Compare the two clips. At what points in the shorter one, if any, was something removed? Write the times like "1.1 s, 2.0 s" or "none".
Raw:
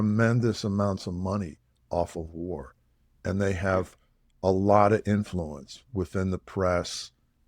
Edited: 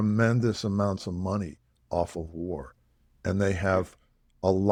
none